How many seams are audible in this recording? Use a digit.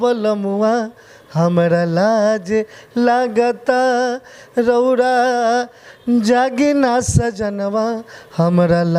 0